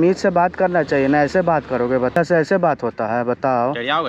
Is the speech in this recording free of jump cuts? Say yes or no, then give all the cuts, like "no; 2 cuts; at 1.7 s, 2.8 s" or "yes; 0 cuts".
no; 1 cut; at 2.2 s